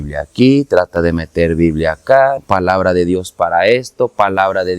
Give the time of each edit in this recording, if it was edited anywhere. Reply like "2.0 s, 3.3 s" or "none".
2.4 s